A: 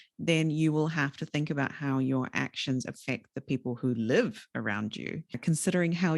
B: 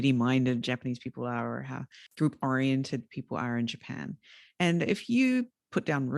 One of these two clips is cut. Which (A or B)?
A